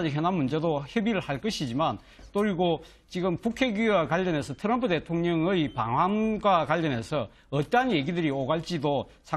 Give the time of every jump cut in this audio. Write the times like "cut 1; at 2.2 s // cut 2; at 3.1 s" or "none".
cut 1; at 1.3 s